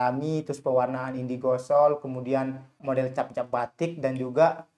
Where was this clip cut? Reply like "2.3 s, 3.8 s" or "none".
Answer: 2.8 s